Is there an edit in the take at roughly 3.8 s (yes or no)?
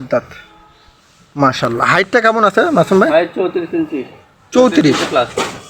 no